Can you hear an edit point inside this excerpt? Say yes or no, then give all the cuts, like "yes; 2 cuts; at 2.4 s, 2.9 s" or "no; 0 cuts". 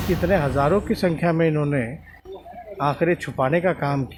no; 0 cuts